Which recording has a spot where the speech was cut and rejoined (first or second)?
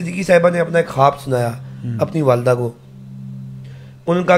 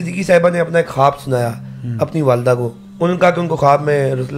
second